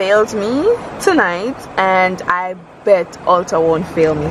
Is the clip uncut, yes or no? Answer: yes